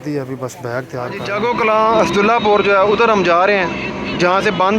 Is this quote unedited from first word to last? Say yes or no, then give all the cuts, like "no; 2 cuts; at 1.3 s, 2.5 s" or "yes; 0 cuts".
no; 1 cut; at 1.2 s